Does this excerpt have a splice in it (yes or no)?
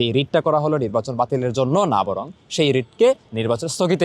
no